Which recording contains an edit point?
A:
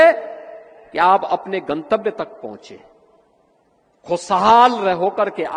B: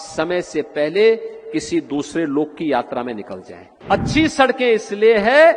B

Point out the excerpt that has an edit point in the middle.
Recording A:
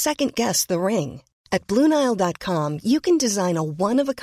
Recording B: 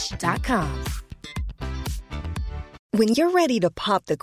B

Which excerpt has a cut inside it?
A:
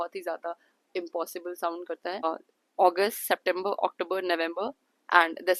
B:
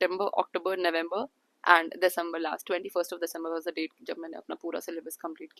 A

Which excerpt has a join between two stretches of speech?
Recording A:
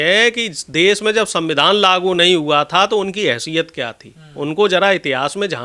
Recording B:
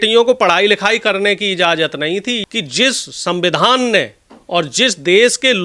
B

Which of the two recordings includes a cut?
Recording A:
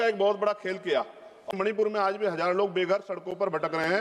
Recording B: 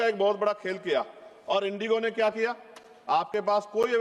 A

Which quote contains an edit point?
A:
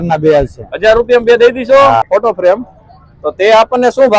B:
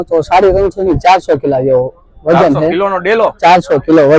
A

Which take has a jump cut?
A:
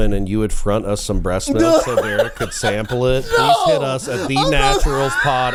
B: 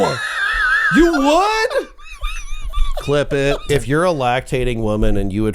B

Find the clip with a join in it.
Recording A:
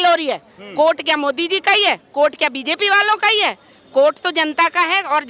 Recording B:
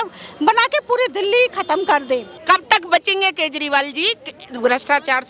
B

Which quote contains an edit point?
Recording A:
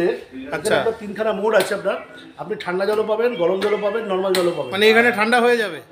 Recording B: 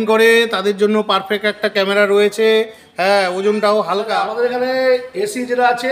B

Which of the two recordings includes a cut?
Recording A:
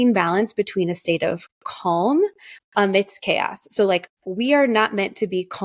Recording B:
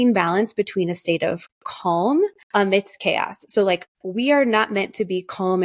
B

